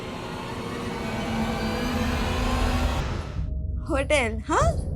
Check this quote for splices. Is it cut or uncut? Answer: cut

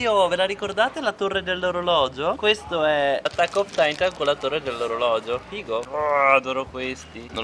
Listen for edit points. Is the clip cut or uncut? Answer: uncut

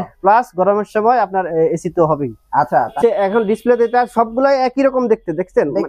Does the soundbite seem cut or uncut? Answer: cut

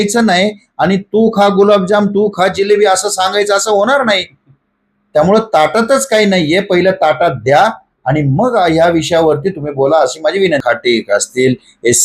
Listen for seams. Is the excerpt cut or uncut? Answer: cut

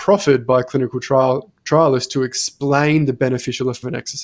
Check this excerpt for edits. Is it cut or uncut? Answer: uncut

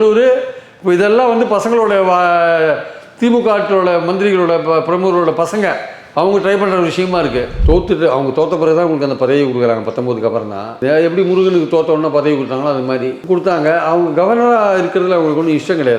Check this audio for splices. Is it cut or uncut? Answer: cut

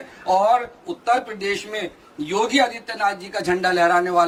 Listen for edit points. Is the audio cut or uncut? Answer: uncut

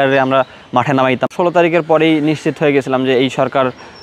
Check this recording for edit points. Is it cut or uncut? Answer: cut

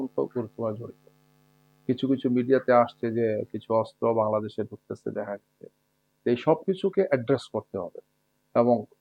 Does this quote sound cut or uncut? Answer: uncut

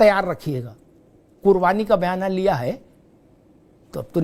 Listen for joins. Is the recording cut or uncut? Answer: uncut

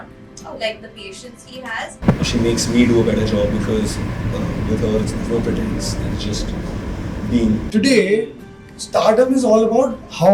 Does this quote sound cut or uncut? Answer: cut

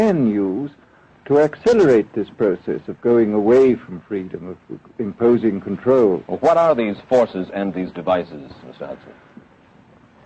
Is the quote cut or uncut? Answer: uncut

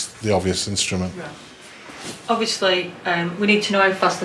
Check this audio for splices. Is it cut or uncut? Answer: cut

